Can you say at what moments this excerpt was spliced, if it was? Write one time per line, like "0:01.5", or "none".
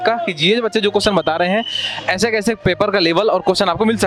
none